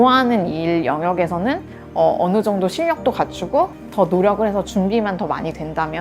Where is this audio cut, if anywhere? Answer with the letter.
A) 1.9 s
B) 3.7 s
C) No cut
C